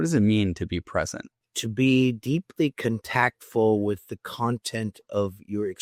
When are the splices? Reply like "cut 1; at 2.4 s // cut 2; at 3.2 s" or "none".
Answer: none